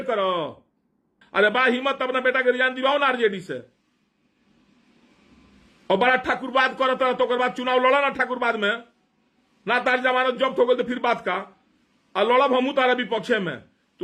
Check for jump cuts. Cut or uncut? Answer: cut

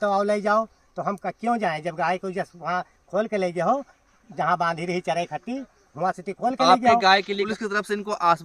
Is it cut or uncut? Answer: cut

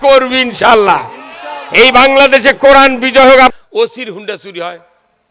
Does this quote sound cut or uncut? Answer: cut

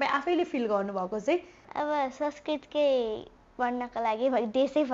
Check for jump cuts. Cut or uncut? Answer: cut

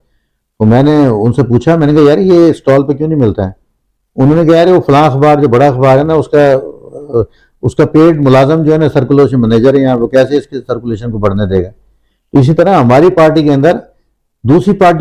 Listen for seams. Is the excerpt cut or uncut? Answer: uncut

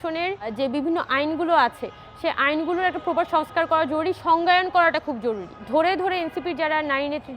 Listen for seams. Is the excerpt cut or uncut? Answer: cut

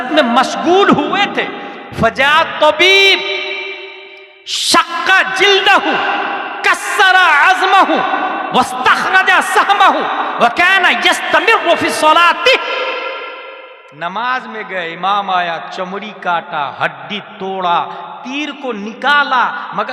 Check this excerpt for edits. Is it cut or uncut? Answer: uncut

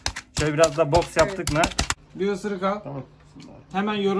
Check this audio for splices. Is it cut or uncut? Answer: cut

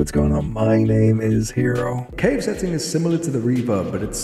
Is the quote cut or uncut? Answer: uncut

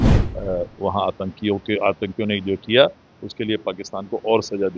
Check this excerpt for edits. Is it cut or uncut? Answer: uncut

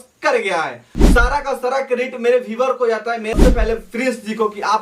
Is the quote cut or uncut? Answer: cut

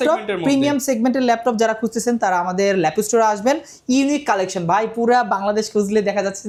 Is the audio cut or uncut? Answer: uncut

